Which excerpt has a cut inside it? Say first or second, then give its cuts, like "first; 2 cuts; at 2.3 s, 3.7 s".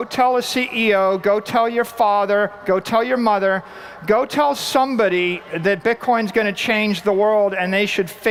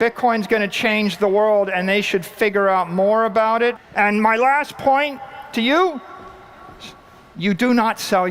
second; 1 cut; at 3.8 s